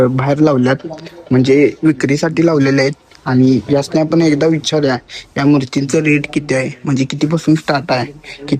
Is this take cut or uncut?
uncut